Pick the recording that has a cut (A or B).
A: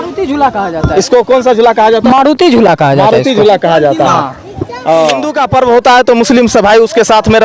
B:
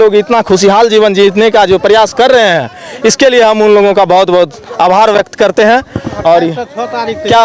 A